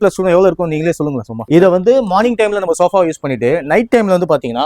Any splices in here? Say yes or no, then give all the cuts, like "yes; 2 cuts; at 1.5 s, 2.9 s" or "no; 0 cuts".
yes; 1 cut; at 1.3 s